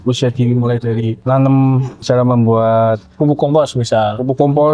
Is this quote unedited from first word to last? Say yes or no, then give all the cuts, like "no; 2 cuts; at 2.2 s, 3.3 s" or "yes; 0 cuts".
no; 2 cuts; at 1.1 s, 2.0 s